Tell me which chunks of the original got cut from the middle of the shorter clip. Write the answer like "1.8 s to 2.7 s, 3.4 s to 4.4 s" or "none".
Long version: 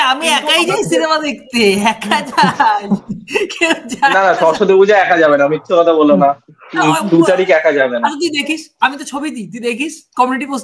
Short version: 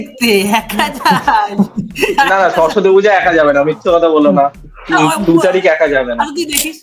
3.4 s to 4.0 s